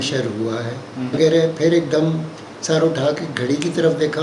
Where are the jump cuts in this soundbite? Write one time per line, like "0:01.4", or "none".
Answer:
0:01.2